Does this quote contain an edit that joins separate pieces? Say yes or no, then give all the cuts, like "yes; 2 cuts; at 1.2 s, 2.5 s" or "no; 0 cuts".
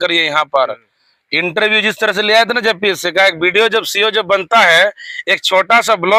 no; 0 cuts